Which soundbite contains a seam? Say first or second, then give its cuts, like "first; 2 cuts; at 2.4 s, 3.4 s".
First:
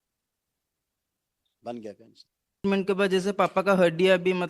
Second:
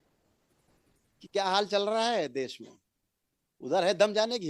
first; 1 cut; at 2.6 s